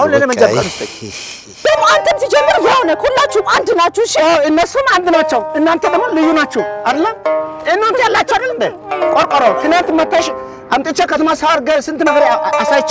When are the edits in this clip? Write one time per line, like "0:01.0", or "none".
0:01.5